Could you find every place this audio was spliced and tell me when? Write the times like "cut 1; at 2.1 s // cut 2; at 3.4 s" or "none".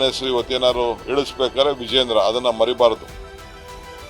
cut 1; at 3.0 s